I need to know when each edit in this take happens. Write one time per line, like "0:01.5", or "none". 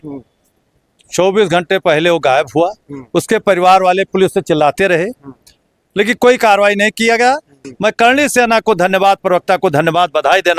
0:07.6